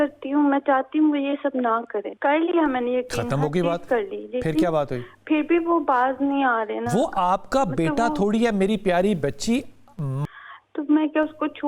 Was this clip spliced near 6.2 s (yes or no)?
no